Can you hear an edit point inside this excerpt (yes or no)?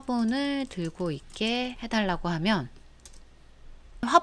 no